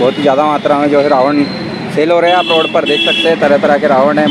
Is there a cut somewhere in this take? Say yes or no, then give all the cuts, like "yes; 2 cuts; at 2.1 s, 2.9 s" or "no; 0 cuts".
no; 0 cuts